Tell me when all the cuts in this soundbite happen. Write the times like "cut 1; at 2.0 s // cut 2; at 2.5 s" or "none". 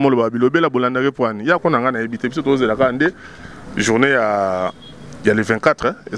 cut 1; at 1.6 s